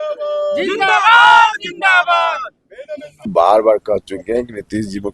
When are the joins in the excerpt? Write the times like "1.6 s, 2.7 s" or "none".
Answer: 3.2 s